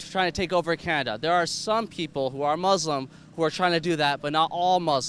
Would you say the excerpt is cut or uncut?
uncut